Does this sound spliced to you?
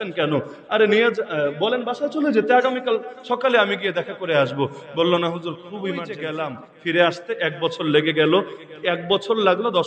yes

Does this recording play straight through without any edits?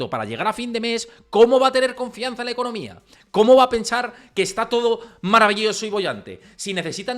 yes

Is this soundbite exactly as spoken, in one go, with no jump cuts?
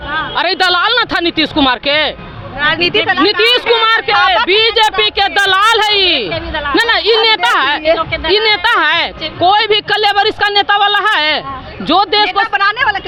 yes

